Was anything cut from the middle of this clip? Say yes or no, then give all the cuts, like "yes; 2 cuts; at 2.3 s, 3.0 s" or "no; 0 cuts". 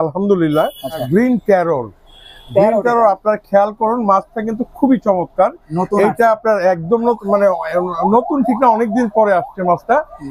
yes; 1 cut; at 1.0 s